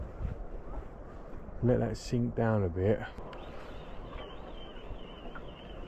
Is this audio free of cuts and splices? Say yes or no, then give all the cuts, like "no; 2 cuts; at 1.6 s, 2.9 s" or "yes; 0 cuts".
no; 1 cut; at 3.1 s